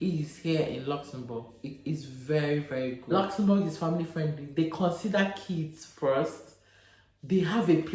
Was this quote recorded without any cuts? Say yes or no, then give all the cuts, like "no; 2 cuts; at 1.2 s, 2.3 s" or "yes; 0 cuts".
no; 1 cut; at 3.1 s